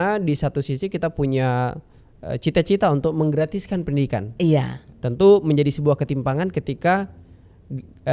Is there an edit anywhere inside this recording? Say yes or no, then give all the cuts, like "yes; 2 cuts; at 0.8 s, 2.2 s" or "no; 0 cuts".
no; 0 cuts